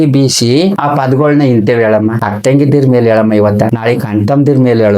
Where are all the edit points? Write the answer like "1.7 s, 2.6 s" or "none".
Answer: 0.8 s, 2.2 s, 3.8 s